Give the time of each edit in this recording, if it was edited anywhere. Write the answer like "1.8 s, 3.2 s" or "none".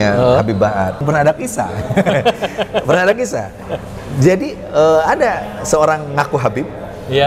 1.0 s

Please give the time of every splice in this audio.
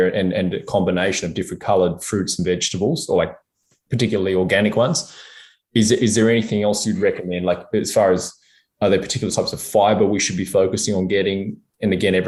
none

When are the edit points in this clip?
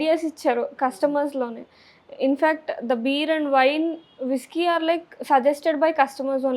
none

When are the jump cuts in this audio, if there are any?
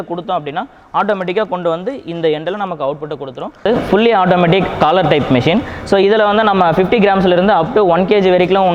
3.7 s

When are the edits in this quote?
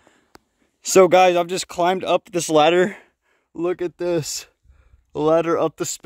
none

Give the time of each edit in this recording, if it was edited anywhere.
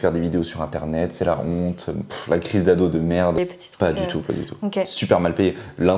3.4 s

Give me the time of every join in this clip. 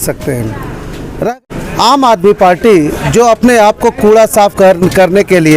1.3 s

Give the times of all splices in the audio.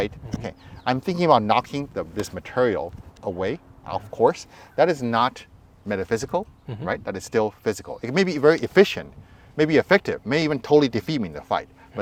none

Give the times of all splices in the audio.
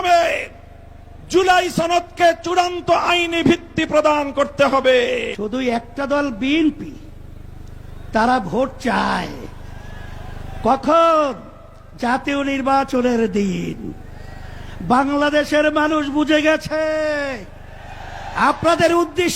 5.4 s

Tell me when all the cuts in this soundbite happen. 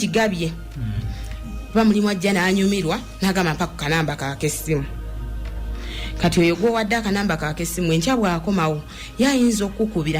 none

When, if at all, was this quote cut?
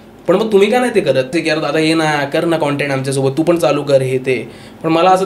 1.3 s

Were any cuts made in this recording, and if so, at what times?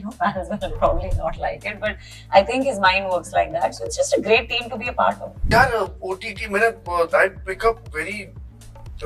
5.3 s

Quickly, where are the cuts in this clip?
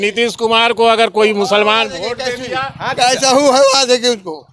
none

